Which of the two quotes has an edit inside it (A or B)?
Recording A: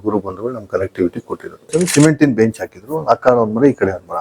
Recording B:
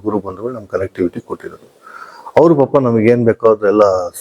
A